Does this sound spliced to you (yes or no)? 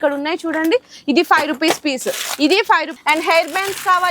yes